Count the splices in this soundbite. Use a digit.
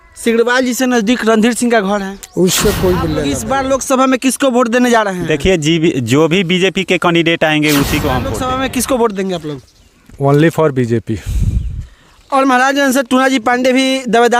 2